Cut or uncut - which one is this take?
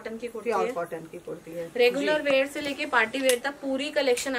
uncut